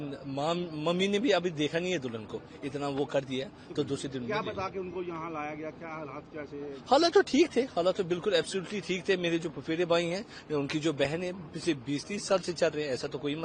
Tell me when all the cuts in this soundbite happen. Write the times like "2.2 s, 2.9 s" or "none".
none